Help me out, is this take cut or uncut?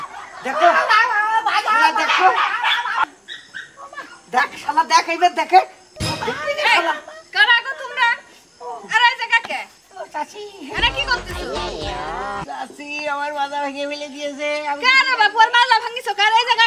uncut